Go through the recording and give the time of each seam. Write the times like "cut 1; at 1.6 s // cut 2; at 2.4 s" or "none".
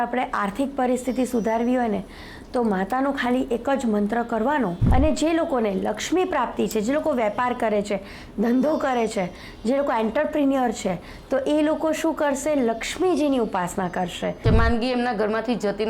cut 1; at 4.8 s // cut 2; at 14.4 s